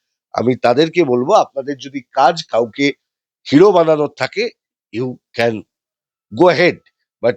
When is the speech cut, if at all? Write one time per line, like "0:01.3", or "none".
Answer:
none

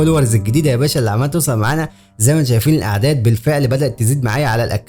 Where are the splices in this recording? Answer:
none

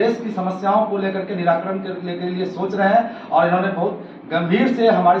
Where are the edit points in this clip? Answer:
none

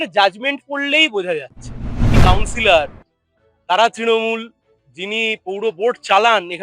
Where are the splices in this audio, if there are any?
0:02.1

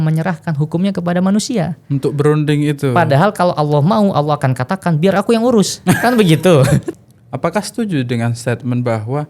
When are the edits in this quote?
0:06.9

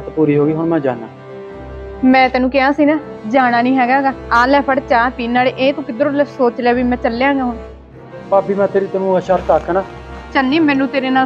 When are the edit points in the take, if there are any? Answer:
none

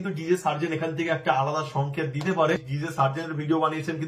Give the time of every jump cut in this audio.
0:02.6

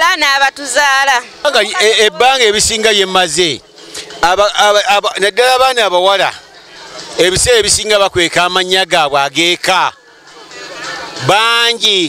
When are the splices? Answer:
0:01.4

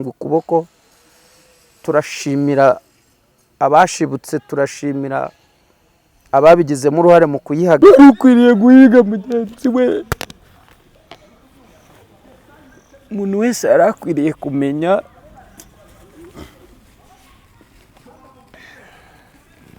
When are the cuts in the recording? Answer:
0:07.8

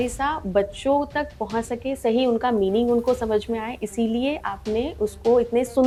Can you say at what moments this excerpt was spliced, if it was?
none

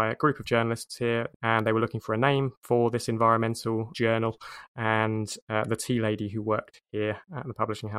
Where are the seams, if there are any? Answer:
0:01.3
0:02.6
0:03.9
0:06.8

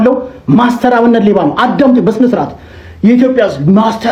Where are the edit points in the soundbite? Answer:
none

